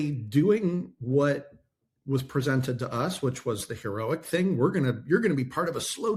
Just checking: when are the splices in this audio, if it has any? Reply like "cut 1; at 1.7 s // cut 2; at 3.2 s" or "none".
none